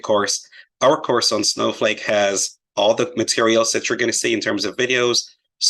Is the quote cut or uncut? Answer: cut